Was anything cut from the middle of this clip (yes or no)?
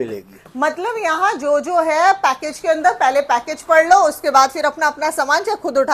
no